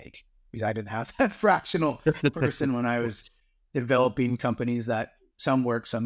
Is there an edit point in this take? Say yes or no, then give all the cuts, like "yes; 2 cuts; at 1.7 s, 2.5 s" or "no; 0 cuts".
no; 0 cuts